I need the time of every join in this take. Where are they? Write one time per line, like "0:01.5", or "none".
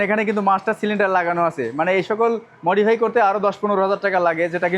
none